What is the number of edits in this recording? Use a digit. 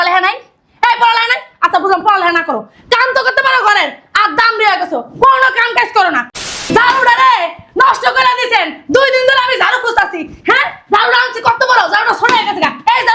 1